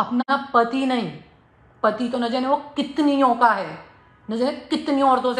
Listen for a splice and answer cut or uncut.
uncut